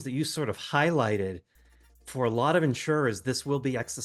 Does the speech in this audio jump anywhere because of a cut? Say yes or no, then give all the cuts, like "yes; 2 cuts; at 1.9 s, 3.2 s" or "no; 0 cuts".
no; 0 cuts